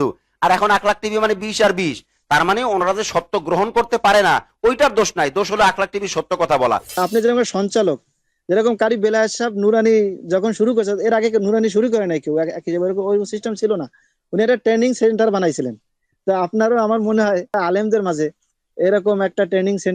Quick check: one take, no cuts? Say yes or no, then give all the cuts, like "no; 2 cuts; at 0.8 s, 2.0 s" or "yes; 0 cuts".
no; 2 cuts; at 7.0 s, 17.6 s